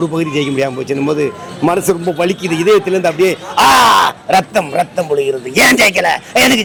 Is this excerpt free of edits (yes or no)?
yes